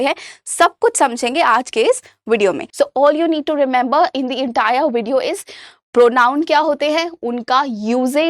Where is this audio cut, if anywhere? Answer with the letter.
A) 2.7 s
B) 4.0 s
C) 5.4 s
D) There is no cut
A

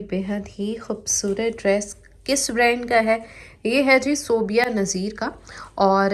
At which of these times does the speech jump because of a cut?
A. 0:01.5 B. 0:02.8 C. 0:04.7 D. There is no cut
D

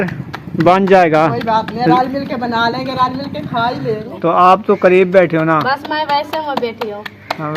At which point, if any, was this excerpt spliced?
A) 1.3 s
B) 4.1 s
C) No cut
B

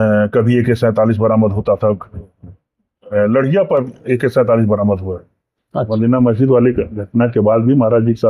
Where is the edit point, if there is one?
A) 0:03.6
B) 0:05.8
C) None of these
B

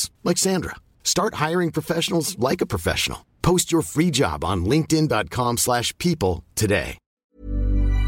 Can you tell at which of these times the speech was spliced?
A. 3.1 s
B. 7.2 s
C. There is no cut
B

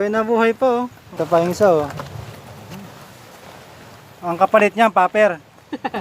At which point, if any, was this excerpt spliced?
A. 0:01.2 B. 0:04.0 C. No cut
A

